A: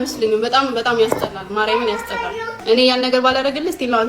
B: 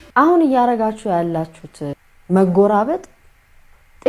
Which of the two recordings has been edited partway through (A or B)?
A